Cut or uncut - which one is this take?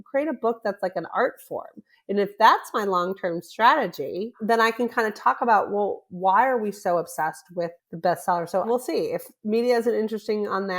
cut